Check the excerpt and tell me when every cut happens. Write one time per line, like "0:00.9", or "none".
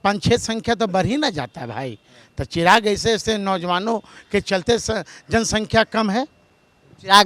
none

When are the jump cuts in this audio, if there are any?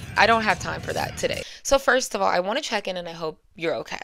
0:01.4

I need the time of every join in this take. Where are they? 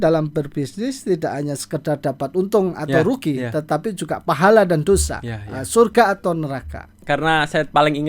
0:06.9

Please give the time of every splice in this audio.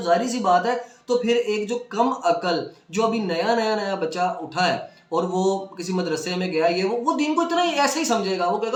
none

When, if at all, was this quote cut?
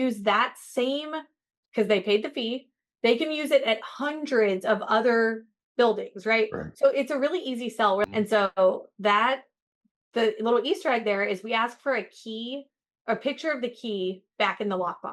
0:08.1

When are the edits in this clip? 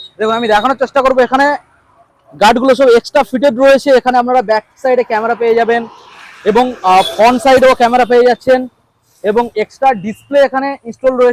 none

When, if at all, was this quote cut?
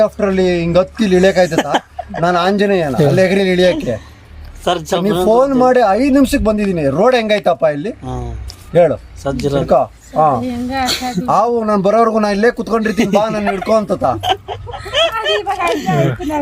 none

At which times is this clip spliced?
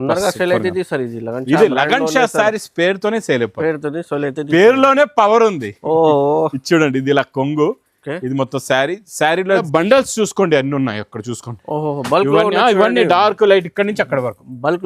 0:09.6

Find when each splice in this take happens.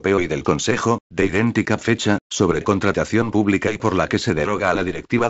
0:01.0

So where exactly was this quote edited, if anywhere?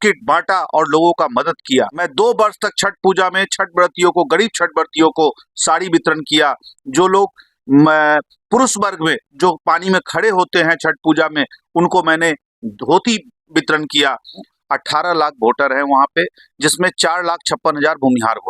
0:02.1
0:14.5

